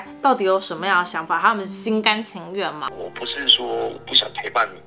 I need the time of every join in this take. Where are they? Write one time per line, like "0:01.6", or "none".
0:02.9